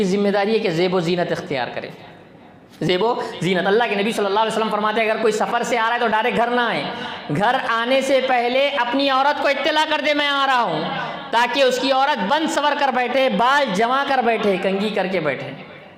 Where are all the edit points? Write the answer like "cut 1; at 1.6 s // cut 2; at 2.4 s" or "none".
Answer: none